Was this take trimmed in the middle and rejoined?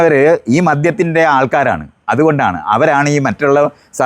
no; 0 cuts

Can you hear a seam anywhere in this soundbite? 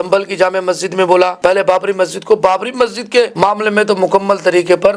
no; 0 cuts

